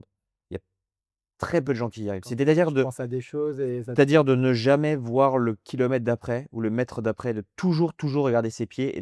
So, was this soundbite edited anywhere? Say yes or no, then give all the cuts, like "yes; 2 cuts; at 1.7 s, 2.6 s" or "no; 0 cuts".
no; 0 cuts